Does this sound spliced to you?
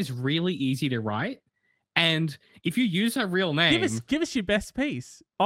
no; 0 cuts

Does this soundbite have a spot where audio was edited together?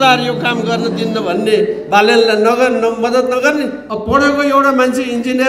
yes; 1 cut; at 3.9 s

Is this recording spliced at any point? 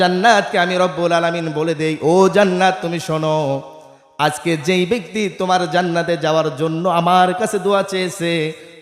no; 0 cuts

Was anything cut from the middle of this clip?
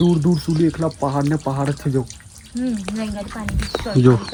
no; 0 cuts

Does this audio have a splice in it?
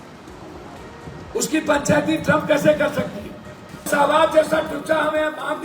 yes; 1 cut; at 3.9 s

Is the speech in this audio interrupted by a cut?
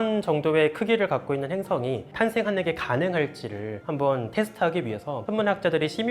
yes; 2 cuts; at 2.1 s, 5.1 s

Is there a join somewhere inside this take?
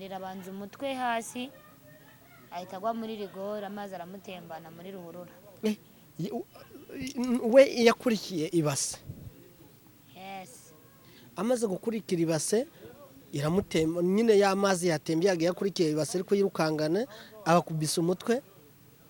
no; 0 cuts

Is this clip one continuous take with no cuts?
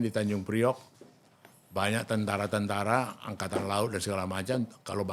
yes; 0 cuts

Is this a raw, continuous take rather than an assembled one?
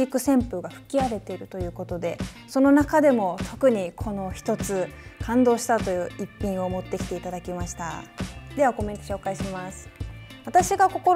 yes; 0 cuts

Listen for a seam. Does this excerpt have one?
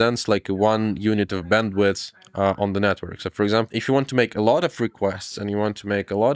no; 0 cuts

